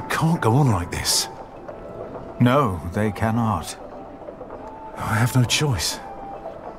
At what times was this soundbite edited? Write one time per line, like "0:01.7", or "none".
0:03.7
0:05.0